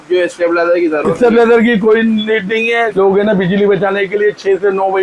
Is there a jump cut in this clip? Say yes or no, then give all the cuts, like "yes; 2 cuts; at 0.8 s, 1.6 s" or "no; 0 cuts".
yes; 1 cut; at 2.9 s